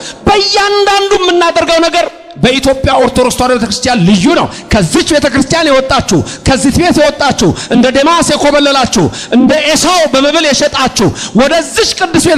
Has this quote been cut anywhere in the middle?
no; 0 cuts

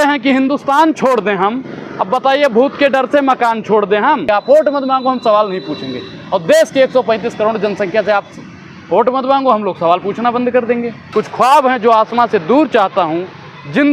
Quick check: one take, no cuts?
no; 2 cuts; at 4.2 s, 11.0 s

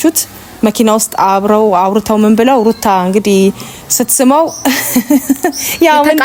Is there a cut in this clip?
no; 0 cuts

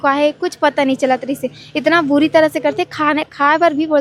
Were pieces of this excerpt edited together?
no; 0 cuts

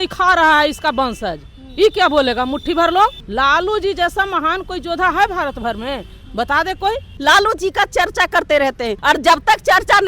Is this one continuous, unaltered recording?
no; 3 cuts; at 3.2 s, 7.1 s, 8.9 s

